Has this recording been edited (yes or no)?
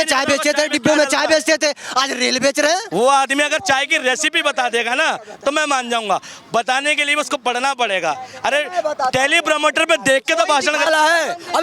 yes